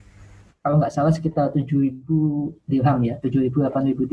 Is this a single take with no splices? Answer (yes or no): yes